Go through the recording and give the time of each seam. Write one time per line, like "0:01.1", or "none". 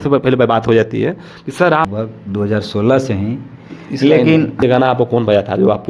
0:01.9
0:04.6

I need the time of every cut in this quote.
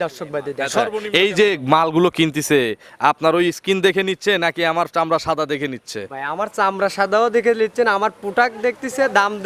0:00.9

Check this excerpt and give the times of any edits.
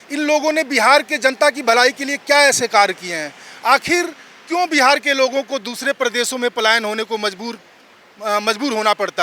none

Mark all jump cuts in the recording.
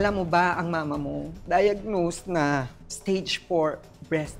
none

